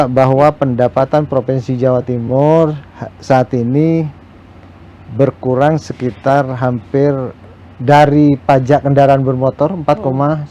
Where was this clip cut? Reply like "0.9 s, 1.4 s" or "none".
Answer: none